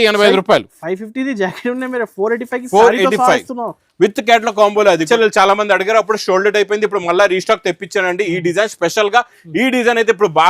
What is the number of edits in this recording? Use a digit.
1